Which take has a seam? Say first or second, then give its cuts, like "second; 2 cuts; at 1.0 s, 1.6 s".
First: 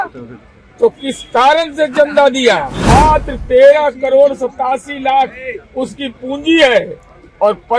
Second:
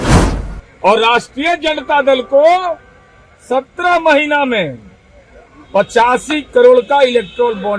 first; 1 cut; at 2.7 s